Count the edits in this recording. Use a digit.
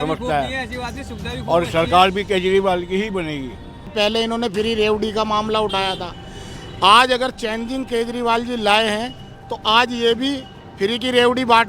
1